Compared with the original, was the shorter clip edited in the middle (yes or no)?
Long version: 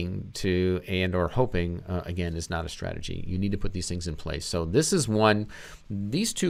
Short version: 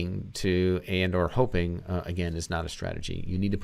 no